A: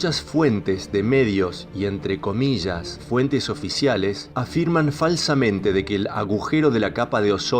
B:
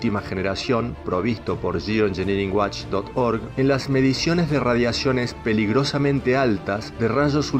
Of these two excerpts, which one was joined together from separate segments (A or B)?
A